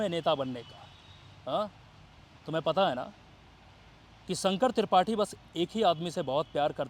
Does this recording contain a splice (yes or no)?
no